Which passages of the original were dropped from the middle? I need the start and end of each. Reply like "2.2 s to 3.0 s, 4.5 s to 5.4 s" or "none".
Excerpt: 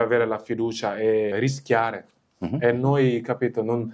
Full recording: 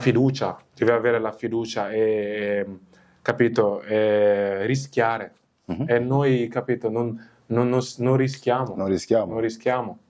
2.3 s to 4.6 s